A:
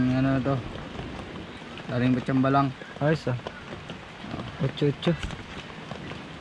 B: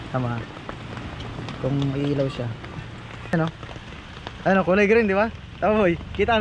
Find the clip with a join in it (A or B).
B